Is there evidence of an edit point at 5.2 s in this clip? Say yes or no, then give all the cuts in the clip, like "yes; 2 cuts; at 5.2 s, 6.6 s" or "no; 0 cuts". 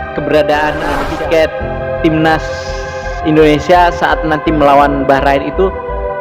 no; 1 cut; at 1.0 s